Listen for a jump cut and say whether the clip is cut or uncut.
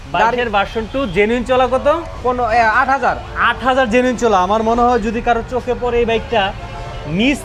uncut